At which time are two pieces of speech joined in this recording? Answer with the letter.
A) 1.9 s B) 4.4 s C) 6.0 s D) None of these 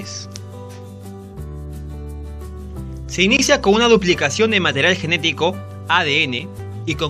B